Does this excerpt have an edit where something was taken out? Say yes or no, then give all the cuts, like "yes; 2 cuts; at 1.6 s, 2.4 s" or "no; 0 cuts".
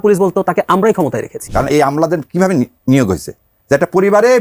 yes; 1 cut; at 1.4 s